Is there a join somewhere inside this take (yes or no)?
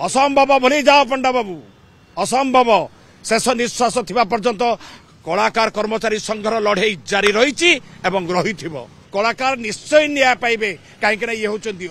yes